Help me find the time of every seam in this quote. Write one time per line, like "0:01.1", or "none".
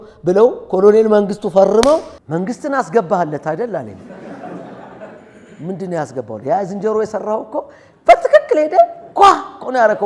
0:02.2